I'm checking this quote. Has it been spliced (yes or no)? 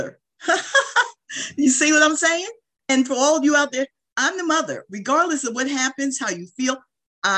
yes